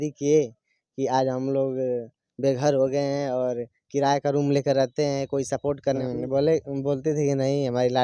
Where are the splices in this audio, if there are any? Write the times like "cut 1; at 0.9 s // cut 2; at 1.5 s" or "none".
cut 1; at 6.0 s

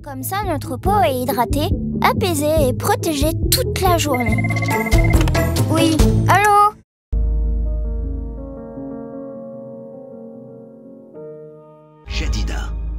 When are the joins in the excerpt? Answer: cut 1; at 6.9 s

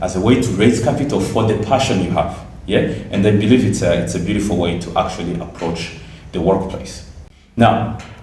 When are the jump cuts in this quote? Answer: none

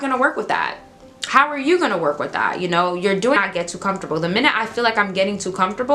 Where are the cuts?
cut 1; at 3.4 s

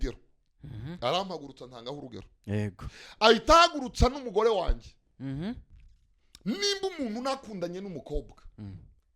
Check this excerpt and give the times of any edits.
cut 1; at 5.7 s

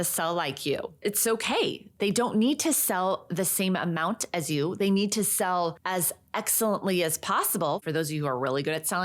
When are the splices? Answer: cut 1; at 5.8 s // cut 2; at 7.8 s

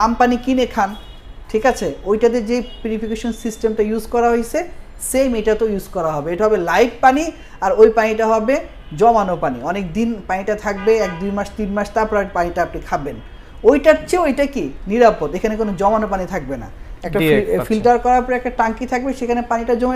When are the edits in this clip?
none

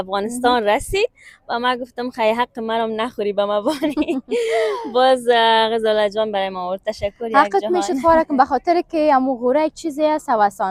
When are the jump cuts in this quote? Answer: none

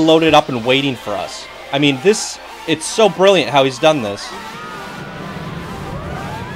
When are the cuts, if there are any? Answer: none

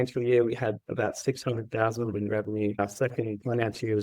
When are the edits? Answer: cut 1; at 2.8 s

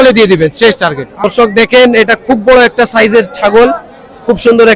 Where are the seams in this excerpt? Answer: cut 1; at 1.5 s

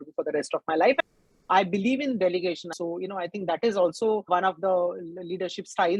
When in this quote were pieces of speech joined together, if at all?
cut 1; at 1.5 s // cut 2; at 2.7 s

